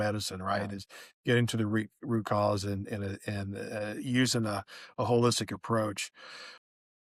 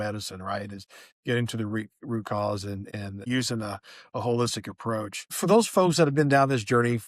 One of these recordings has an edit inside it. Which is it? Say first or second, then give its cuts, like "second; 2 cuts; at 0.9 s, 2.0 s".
second; 2 cuts; at 3.2 s, 5.2 s